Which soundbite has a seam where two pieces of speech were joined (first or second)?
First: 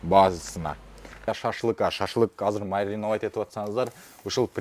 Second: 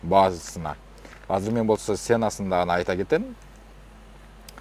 first